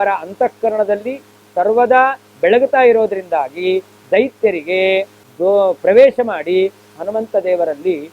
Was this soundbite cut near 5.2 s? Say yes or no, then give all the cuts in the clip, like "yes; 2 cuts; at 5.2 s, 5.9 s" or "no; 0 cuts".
yes; 1 cut; at 5.2 s